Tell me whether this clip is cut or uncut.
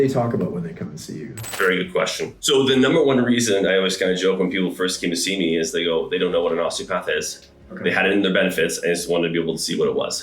cut